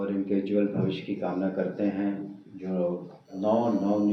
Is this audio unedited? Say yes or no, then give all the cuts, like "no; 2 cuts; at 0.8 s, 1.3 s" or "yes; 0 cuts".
yes; 0 cuts